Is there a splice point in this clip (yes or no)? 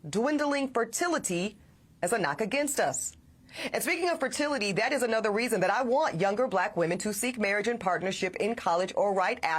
no